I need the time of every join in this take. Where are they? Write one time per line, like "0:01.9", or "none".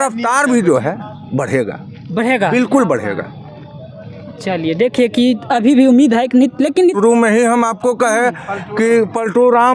0:06.9